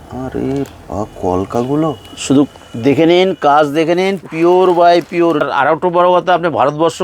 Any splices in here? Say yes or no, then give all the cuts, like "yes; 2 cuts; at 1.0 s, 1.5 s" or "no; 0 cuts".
yes; 1 cut; at 5.4 s